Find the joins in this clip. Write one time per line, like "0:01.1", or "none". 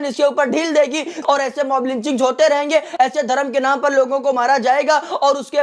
0:01.3